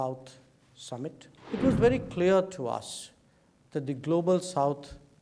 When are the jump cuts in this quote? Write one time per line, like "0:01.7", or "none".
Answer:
0:01.3